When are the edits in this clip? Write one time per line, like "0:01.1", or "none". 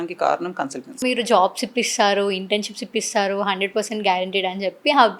0:01.0